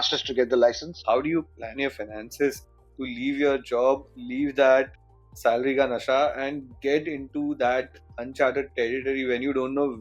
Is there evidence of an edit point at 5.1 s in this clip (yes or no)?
no